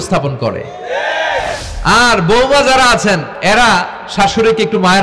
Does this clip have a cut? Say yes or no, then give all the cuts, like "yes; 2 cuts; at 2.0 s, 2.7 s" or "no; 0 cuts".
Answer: yes; 2 cuts; at 1.6 s, 3.3 s